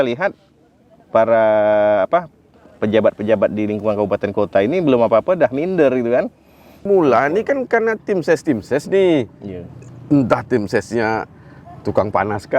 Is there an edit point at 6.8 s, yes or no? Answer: yes